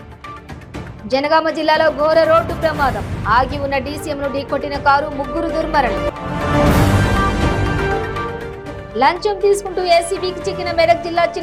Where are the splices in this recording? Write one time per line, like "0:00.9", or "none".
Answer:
none